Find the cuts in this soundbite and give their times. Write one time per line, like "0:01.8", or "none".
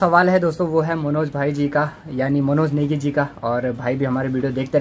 none